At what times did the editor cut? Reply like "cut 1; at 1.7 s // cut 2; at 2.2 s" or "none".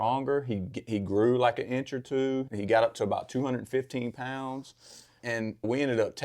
cut 1; at 2.5 s // cut 2; at 5.3 s